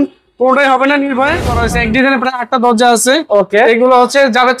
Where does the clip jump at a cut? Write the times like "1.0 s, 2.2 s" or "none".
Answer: 1.5 s

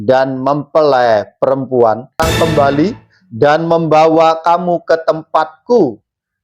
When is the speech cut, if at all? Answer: 2.2 s

